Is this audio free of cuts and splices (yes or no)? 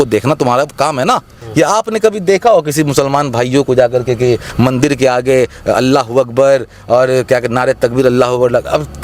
no